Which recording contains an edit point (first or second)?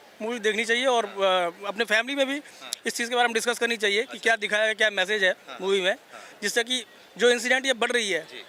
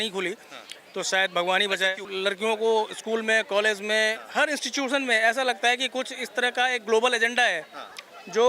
second